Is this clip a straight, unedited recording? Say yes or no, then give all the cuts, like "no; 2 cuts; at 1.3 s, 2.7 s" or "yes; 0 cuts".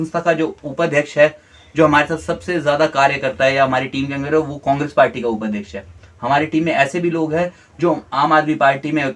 yes; 0 cuts